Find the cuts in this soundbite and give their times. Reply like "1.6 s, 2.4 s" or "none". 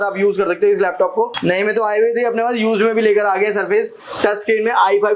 1.3 s